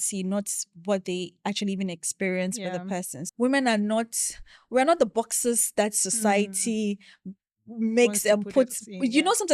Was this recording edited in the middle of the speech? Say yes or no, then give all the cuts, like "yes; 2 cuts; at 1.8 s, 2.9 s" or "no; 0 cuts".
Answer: yes; 1 cut; at 3.2 s